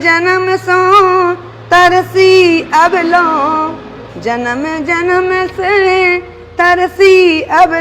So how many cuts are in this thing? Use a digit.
0